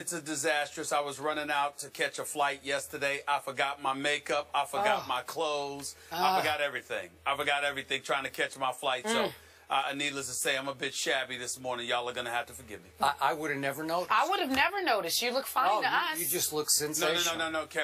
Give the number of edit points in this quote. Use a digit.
1